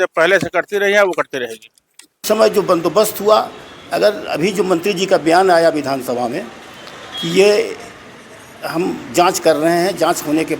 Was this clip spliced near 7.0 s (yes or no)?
no